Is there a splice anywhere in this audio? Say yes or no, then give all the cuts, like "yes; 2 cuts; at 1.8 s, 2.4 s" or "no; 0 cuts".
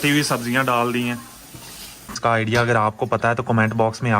yes; 1 cut; at 2.2 s